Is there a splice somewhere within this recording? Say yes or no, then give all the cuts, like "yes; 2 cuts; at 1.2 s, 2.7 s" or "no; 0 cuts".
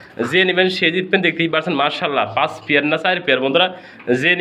no; 0 cuts